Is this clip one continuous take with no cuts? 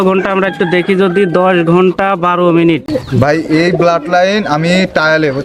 no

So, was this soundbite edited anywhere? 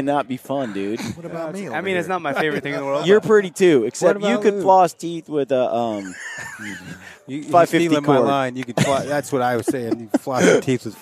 no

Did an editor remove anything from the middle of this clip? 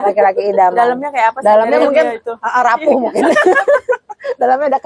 no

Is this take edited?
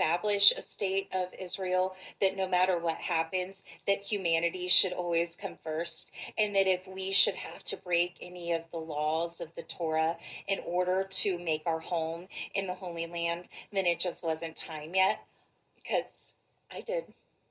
no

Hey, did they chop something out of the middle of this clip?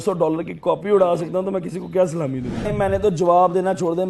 yes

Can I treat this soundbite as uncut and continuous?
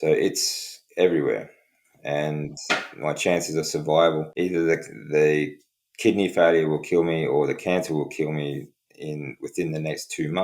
no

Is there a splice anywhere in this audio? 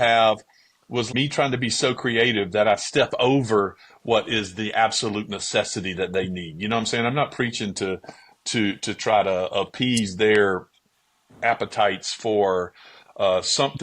yes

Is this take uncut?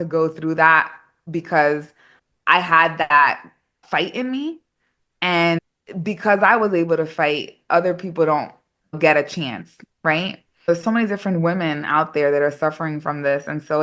no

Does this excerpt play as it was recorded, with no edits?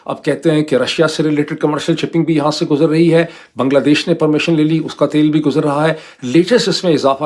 yes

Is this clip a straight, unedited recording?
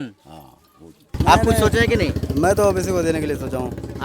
no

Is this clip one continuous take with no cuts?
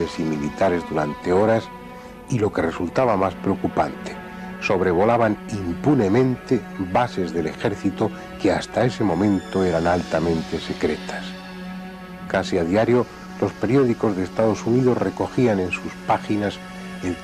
yes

